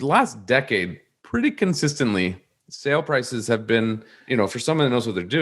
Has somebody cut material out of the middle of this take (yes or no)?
yes